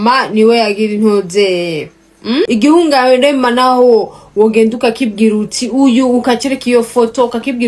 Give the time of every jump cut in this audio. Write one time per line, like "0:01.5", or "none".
0:02.5